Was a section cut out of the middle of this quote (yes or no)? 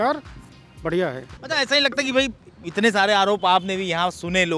no